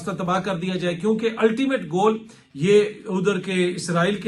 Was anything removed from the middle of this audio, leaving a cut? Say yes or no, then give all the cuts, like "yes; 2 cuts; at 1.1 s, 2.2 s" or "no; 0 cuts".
no; 0 cuts